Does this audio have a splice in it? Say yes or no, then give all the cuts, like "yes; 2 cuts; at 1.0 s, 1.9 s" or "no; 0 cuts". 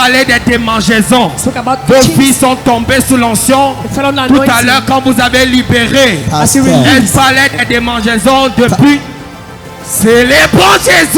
no; 0 cuts